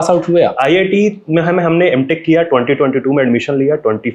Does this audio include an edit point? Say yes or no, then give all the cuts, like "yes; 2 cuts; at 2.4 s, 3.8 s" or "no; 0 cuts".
no; 0 cuts